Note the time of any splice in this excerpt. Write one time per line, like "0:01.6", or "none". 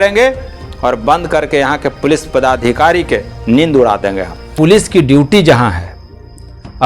0:04.5

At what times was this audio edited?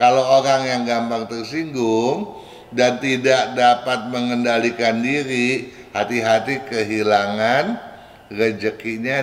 none

